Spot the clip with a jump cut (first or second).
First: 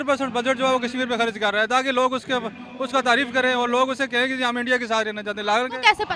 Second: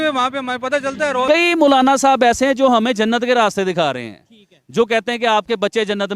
second